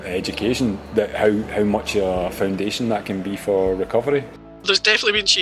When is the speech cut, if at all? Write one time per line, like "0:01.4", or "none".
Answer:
0:04.3